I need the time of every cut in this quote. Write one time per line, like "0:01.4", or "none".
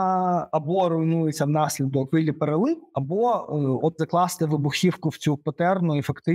0:02.1
0:02.9
0:04.0